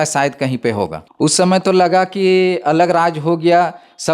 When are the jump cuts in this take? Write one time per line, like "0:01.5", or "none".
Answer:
0:01.0

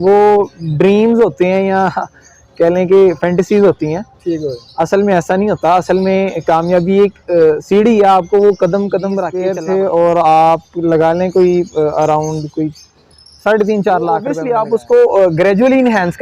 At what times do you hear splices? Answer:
0:09.4
0:14.4

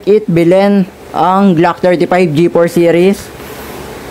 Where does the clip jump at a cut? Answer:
none

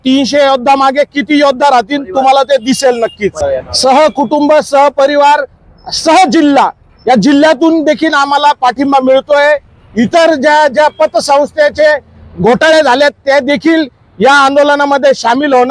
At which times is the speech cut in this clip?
0:03.4

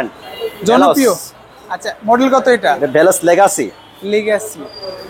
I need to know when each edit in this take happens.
none

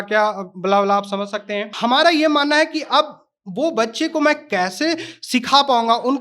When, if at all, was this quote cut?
0:01.7

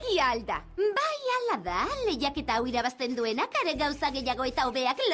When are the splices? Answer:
0:02.2

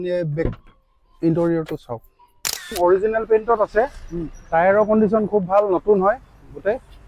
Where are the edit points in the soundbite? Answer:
0:02.7

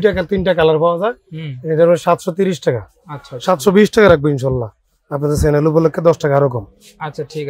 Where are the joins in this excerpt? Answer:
none

